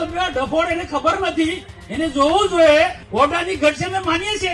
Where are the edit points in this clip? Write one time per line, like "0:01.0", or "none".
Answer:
0:03.0